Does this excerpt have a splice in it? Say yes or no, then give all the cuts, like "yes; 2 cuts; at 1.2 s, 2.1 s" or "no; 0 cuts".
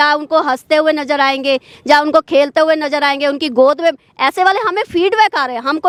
no; 0 cuts